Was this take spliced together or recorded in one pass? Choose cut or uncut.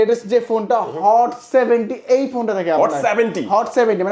uncut